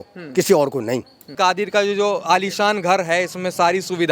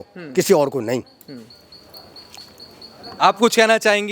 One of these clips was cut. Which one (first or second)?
first